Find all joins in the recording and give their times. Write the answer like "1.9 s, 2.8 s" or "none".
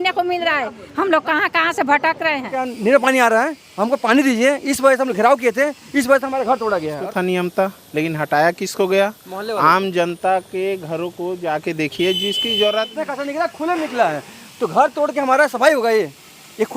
2.6 s, 7.0 s, 12.9 s